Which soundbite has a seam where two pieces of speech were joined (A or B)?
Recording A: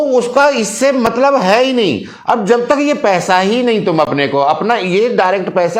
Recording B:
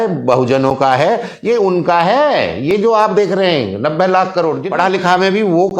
B